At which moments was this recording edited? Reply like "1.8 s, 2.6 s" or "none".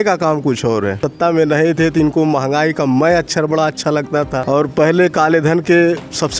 1.1 s, 4.4 s